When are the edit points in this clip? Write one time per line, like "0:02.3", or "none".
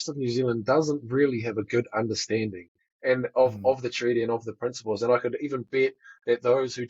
none